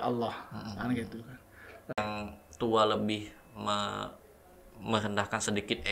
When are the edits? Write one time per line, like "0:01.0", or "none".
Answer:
0:02.0